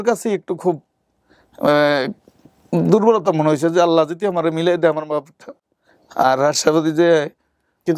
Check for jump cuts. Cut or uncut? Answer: uncut